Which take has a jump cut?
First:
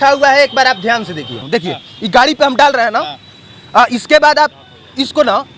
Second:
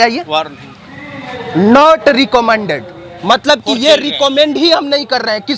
first; 1 cut; at 1.4 s

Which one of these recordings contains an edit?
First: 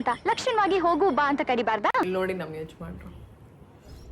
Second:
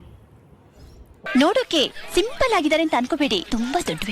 first; 1 cut; at 2.1 s

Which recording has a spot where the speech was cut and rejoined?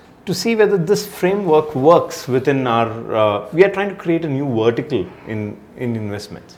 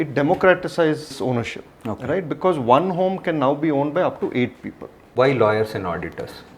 second; 2 cuts; at 1.1 s, 5.1 s

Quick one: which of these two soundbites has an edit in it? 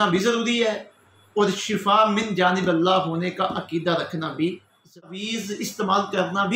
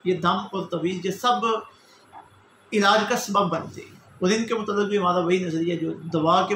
first; 1 cut; at 5.3 s

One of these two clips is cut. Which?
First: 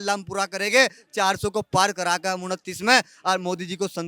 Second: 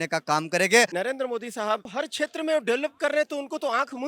second; 2 cuts; at 0.9 s, 1.9 s

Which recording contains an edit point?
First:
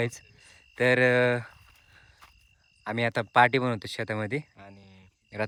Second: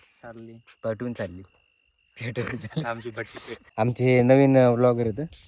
second; 1 cut; at 4.0 s

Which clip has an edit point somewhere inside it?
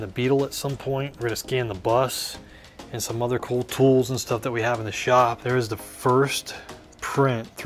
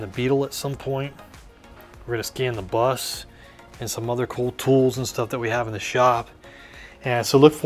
first; 2 cuts; at 1.1 s, 5.4 s

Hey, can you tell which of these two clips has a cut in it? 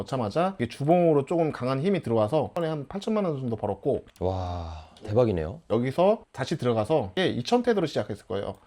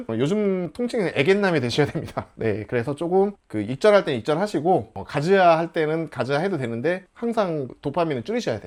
first; 3 cuts; at 2.6 s, 5.7 s, 7.1 s

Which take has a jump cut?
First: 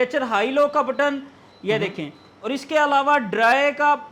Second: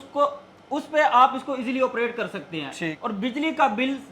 second; 1 cut; at 3.0 s

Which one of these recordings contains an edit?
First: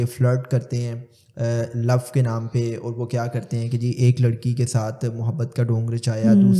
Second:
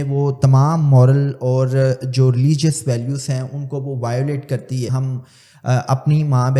second; 1 cut; at 4.9 s

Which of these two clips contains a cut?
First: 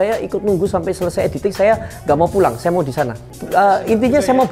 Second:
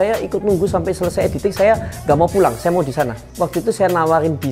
second; 1 cut; at 3.2 s

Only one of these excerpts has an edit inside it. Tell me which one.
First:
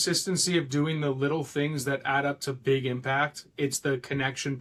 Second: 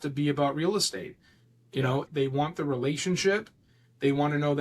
second; 1 cut; at 2.1 s

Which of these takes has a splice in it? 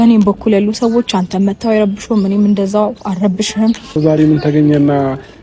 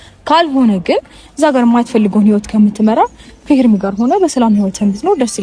first; 1 cut; at 4.0 s

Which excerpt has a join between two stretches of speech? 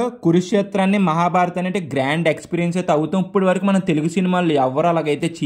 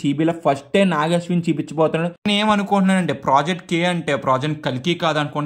second; 1 cut; at 2.1 s

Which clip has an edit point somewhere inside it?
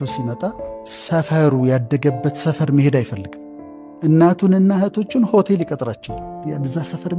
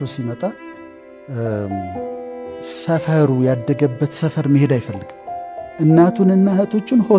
first; 2 cuts; at 0.9 s, 6.2 s

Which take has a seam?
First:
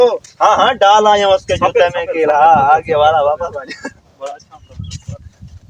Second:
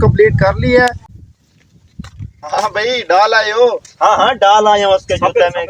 second; 1 cut; at 1.3 s

